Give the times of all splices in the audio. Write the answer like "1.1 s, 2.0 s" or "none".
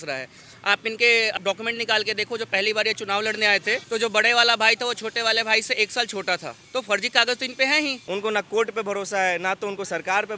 1.4 s, 3.8 s, 6.5 s, 8.0 s

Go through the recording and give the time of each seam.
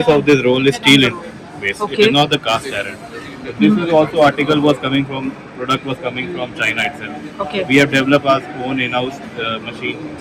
none

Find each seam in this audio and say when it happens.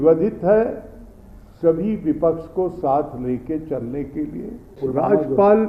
4.8 s

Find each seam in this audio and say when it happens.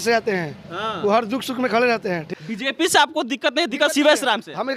2.3 s

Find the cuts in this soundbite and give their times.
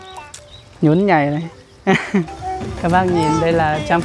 2.3 s

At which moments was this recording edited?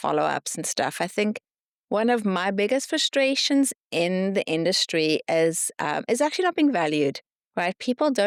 none

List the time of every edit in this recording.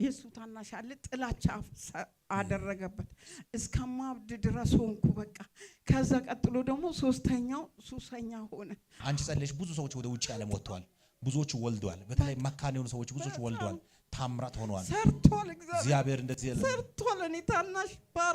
8.9 s

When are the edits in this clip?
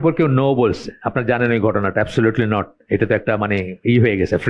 none

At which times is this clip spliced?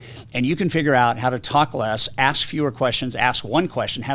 none

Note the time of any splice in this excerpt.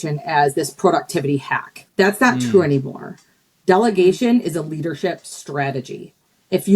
1.8 s

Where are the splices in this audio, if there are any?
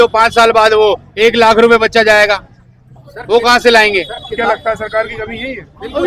none

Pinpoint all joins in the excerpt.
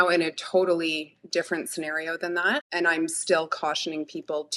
2.7 s

